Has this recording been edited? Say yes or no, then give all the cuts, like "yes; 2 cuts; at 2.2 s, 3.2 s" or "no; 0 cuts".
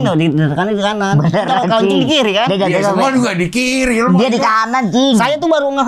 no; 0 cuts